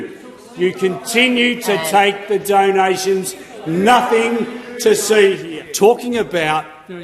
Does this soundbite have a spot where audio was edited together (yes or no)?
yes